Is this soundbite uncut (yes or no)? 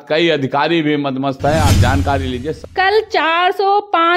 no